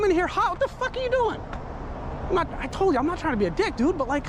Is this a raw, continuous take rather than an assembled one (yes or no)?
yes